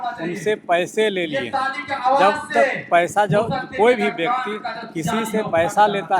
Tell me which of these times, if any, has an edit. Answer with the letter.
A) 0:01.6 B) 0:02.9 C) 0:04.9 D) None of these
D